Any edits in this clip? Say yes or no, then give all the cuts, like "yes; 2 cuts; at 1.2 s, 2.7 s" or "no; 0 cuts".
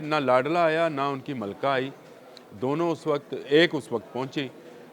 no; 0 cuts